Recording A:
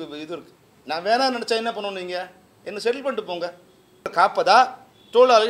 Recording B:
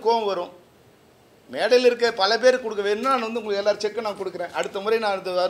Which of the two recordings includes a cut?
A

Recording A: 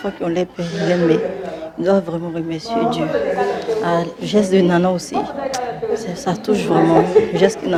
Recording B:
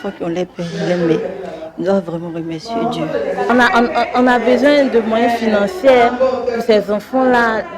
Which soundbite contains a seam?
B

